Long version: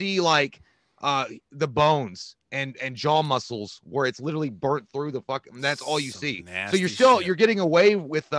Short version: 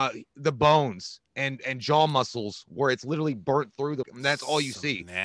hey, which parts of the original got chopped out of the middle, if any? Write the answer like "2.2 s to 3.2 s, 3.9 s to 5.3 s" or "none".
5.2 s to 5.5 s